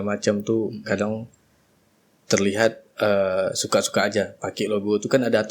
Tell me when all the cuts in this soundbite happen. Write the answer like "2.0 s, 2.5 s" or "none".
none